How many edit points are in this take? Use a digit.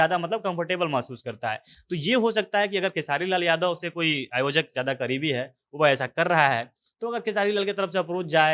0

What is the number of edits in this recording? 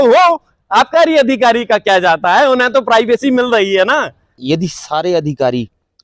1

